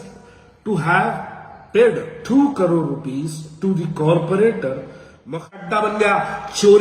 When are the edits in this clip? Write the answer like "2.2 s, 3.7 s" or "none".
5.5 s